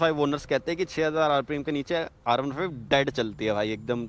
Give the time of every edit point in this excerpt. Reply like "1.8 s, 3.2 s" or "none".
none